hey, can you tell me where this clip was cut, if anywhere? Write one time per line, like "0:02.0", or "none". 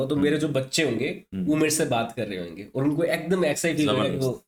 none